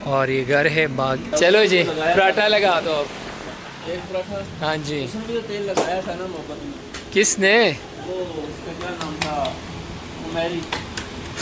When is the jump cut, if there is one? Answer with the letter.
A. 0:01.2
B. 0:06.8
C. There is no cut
A